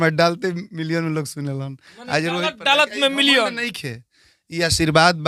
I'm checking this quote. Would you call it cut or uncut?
uncut